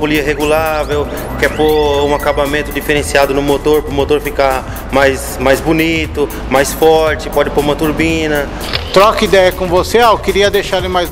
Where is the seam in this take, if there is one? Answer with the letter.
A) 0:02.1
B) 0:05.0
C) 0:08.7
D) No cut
C